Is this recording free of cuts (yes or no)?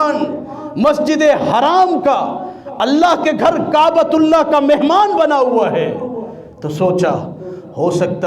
yes